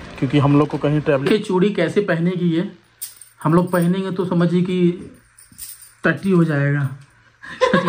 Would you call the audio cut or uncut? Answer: cut